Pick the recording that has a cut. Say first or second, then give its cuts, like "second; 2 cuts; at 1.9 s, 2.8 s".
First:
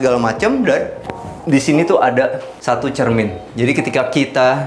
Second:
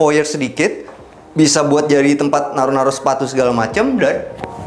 first; 1 cut; at 2.5 s